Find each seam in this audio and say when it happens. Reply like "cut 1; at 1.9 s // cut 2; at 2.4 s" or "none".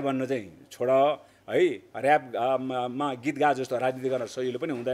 none